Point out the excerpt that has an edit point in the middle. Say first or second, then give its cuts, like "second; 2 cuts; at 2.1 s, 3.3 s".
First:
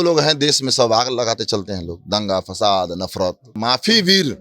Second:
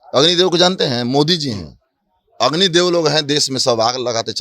first; 1 cut; at 3.5 s